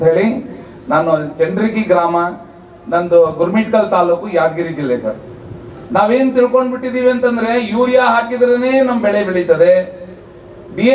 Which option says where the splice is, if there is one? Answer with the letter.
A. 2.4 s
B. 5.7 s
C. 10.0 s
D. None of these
B